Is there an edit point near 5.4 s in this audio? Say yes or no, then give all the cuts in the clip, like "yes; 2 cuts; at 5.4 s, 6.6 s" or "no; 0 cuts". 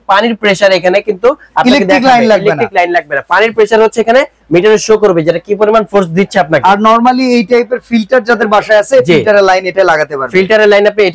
no; 0 cuts